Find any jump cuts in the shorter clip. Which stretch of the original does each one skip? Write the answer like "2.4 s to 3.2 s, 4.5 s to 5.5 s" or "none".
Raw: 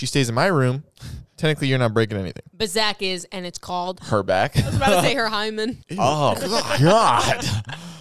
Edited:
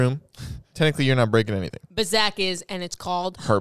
none